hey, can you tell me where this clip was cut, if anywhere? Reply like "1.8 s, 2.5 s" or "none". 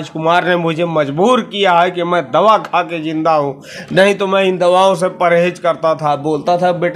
none